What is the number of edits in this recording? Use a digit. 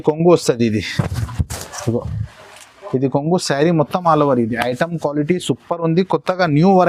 0